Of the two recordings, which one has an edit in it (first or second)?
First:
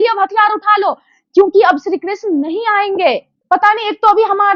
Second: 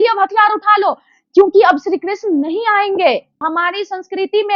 second